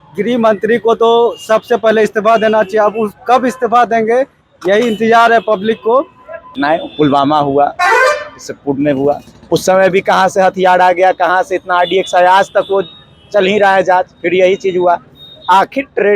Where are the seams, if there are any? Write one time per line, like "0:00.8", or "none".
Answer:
0:06.5